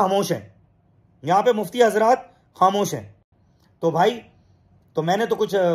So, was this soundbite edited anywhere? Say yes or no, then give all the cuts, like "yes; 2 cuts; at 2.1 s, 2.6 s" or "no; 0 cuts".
no; 0 cuts